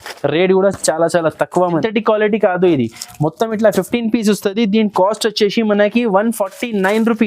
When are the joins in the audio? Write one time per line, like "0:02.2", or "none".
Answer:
0:01.8